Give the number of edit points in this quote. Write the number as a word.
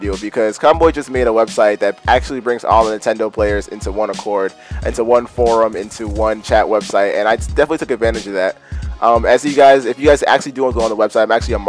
one